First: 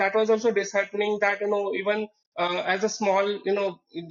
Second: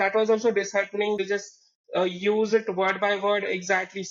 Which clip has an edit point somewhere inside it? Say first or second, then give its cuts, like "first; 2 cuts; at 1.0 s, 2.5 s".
second; 1 cut; at 1.2 s